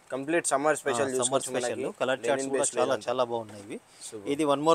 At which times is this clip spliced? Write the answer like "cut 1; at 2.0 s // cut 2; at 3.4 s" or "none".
none